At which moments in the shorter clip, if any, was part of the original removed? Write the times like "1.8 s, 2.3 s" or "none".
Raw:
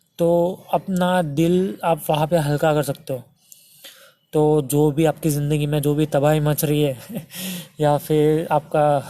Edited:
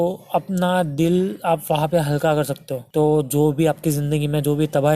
2.7 s